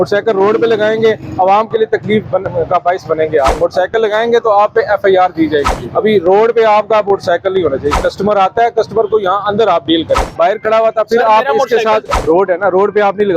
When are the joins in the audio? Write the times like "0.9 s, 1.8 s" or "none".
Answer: 3.5 s, 5.7 s, 10.2 s, 12.1 s